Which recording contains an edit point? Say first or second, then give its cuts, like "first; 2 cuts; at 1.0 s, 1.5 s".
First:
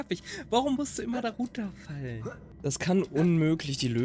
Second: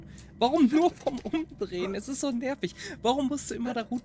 first; 1 cut; at 2.5 s